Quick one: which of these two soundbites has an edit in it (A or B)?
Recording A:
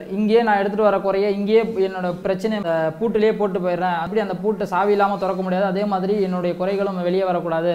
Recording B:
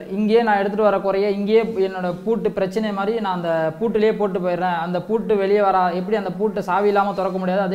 A